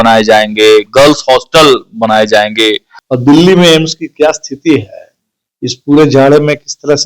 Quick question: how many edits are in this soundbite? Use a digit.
1